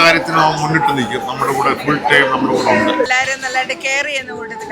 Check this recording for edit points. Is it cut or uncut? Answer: cut